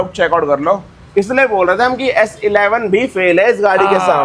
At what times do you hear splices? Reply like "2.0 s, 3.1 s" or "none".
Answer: none